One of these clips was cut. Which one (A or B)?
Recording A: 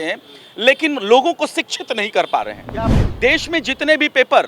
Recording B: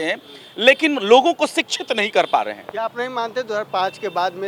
A